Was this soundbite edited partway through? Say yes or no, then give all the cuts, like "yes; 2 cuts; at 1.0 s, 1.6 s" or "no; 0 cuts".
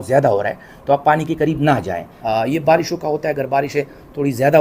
yes; 1 cut; at 2.1 s